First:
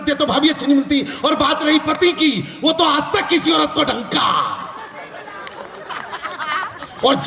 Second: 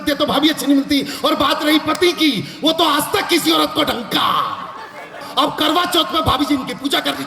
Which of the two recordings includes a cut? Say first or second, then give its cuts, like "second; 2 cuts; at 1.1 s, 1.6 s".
second; 1 cut; at 5.2 s